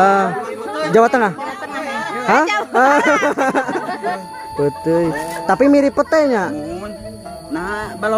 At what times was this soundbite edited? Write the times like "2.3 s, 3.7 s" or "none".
4.0 s